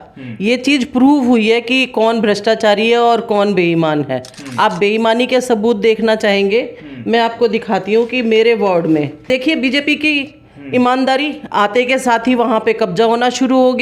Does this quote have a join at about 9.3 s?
yes; 1 cut; at 9.3 s

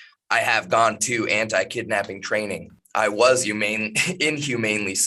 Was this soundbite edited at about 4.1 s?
no; 1 cut; at 2.8 s

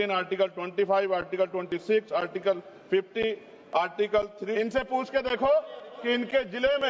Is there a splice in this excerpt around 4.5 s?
yes; 1 cut; at 4.5 s

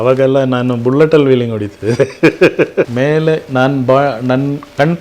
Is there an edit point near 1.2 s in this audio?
no; 1 cut; at 2.9 s

